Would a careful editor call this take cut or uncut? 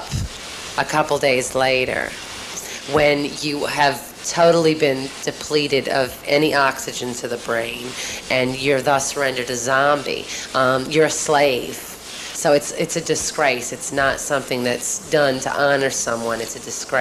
uncut